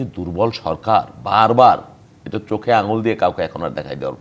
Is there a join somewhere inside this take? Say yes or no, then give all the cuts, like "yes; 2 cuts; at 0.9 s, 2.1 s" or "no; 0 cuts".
no; 0 cuts